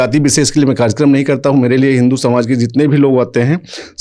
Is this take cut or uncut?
uncut